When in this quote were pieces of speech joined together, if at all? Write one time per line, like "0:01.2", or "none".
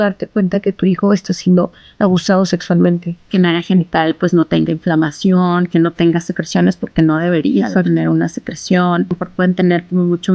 0:03.3
0:09.2